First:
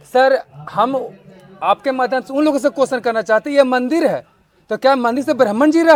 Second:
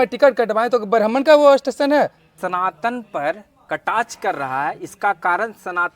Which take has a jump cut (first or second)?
second